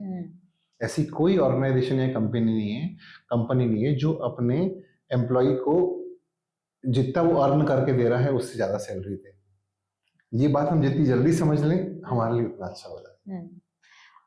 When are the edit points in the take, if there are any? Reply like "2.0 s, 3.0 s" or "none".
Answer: none